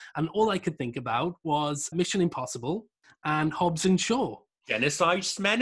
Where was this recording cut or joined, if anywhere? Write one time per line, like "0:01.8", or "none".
0:01.9